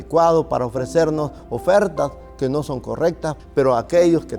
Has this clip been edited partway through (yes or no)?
yes